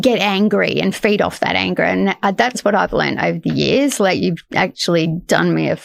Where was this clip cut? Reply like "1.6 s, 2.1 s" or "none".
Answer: none